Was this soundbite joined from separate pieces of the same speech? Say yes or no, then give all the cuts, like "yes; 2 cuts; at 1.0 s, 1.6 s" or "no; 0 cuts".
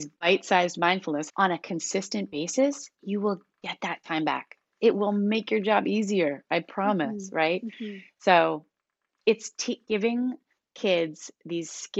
yes; 1 cut; at 1.3 s